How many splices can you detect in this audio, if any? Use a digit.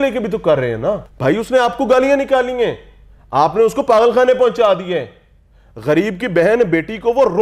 1